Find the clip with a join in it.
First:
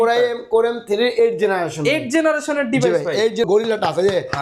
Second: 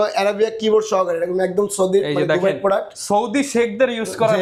first; 1 cut; at 3.4 s

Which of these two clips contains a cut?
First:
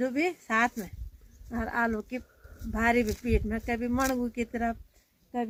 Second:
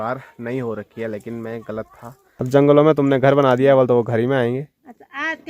second; 1 cut; at 2.2 s

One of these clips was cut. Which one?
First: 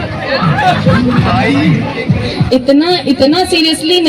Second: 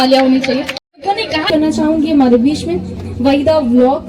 second; 1 cut; at 1.4 s

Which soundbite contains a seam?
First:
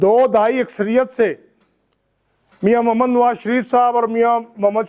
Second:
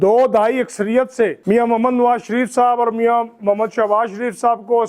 second; 1 cut; at 1.4 s

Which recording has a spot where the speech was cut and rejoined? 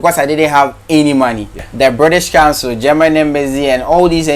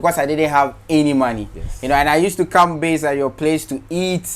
first; 1 cut; at 1.6 s

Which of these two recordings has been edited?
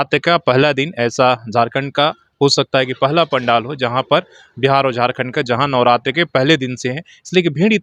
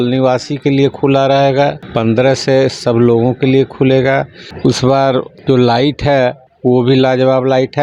second; 4 cuts; at 1.8 s, 4.4 s, 5.3 s, 6.5 s

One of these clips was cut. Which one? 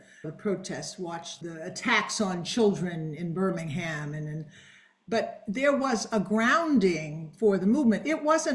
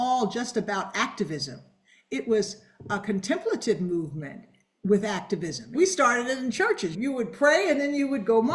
second; 1 cut; at 5.7 s

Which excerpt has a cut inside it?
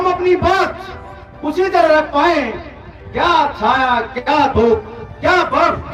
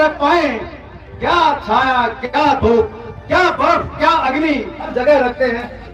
second; 1 cut; at 4.9 s

